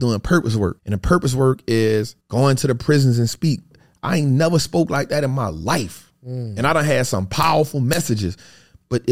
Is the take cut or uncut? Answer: cut